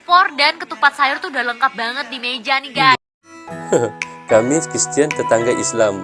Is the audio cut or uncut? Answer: cut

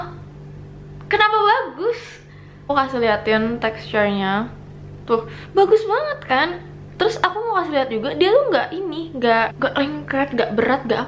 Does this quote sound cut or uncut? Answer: cut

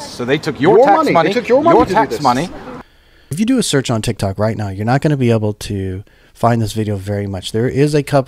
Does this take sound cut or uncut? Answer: cut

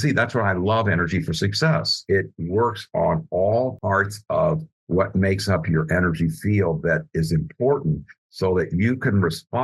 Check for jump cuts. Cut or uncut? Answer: cut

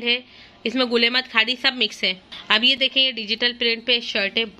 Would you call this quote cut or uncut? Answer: uncut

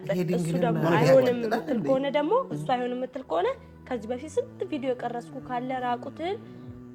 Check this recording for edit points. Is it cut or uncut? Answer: uncut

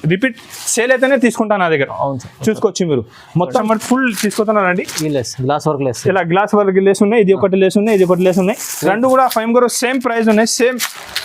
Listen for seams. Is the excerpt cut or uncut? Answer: cut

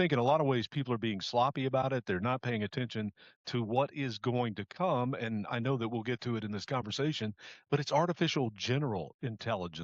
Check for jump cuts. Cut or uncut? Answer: uncut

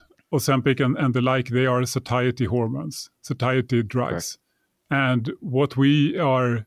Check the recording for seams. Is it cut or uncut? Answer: uncut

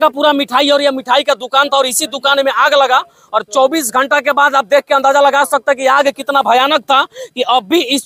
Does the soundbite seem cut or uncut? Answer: uncut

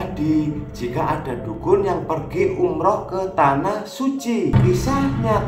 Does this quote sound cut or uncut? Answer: cut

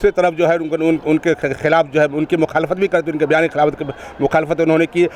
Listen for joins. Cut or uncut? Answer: uncut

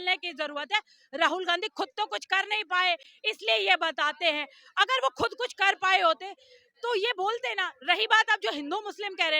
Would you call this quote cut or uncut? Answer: uncut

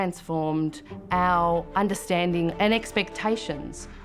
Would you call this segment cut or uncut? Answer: cut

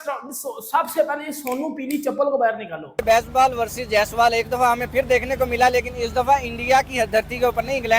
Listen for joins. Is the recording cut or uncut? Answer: cut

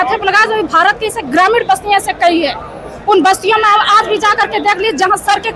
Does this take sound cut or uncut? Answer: uncut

